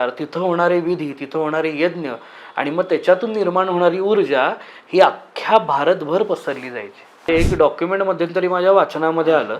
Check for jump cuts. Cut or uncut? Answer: cut